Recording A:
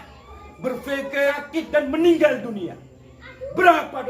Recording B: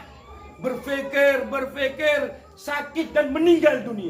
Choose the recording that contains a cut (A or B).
A